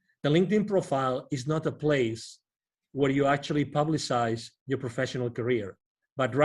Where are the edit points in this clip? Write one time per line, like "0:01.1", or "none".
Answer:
none